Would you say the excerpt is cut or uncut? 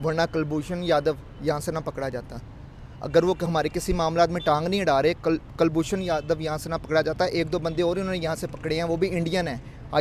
uncut